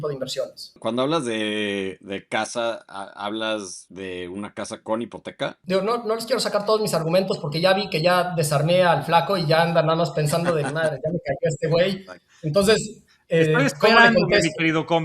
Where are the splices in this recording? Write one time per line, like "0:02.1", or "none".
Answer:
0:00.8
0:03.8
0:05.6